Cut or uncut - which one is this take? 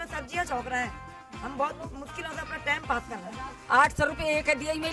cut